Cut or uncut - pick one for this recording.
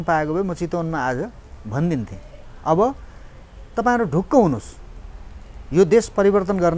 uncut